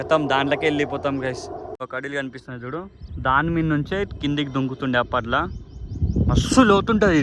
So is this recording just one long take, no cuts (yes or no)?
no